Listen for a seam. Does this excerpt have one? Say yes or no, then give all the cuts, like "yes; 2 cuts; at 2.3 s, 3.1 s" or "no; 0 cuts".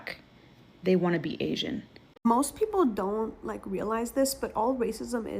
yes; 1 cut; at 2.2 s